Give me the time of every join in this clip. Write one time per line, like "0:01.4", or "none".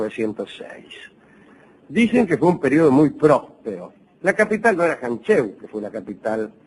0:04.3